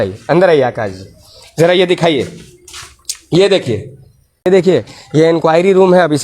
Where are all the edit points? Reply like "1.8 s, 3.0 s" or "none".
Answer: 4.5 s